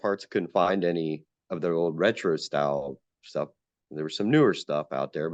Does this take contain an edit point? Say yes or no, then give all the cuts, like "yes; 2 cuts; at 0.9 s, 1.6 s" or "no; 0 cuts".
no; 0 cuts